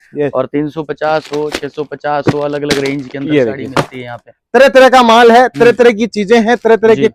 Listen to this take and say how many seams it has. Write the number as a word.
zero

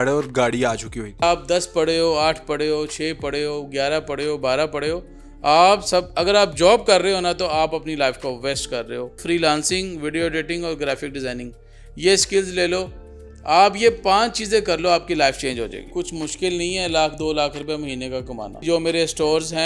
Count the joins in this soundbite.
four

